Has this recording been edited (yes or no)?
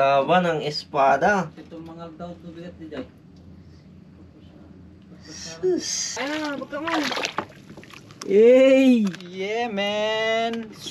yes